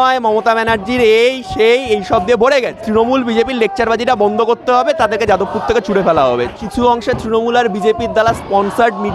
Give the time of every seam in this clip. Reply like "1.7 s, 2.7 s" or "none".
2.8 s, 6.6 s